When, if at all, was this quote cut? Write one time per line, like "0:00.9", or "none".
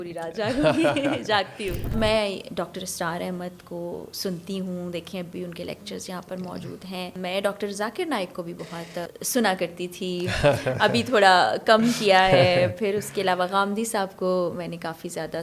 0:01.9
0:07.1
0:09.1